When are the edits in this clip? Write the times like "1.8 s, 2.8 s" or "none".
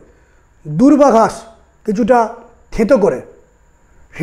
none